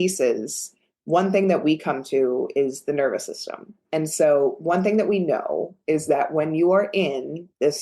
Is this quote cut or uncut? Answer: cut